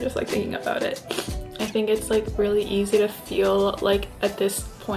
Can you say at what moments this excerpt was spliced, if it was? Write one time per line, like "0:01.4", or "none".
0:01.3